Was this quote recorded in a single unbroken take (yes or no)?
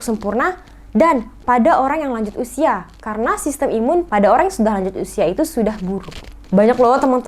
no